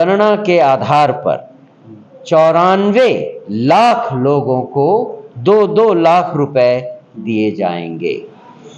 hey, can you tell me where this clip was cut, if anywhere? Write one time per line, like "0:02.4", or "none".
none

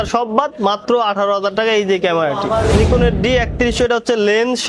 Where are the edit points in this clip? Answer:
0:02.7

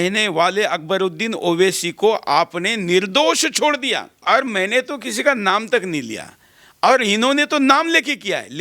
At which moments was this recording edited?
0:04.2

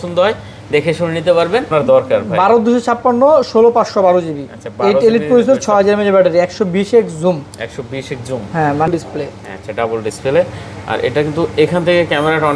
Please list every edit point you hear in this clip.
0:01.7
0:08.9

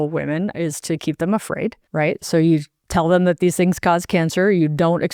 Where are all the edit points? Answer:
0:01.8

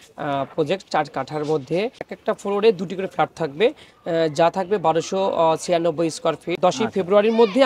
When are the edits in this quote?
0:02.1
0:06.5

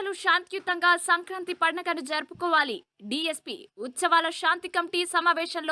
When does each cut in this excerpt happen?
none

